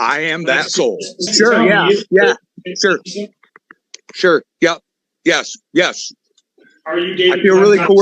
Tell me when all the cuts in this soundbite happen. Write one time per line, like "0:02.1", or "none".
0:01.3